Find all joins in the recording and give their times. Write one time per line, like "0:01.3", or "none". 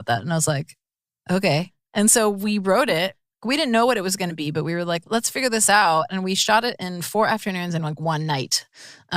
0:01.8
0:03.3

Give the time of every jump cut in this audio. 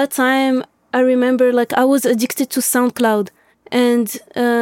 0:03.5

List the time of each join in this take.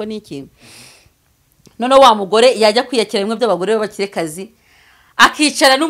none

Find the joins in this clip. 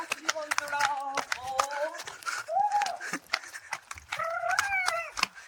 none

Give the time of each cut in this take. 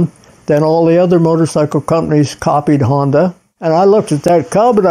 0:03.5

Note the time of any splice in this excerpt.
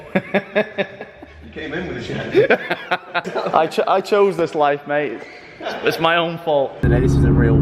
0:03.3
0:06.8

